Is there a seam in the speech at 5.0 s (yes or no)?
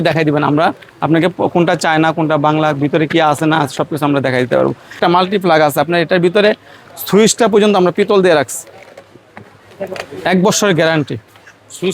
yes